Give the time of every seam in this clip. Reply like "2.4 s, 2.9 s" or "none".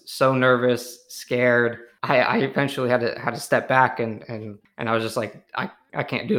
1.9 s, 4.6 s